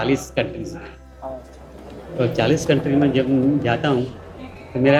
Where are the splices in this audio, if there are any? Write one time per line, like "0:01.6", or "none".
none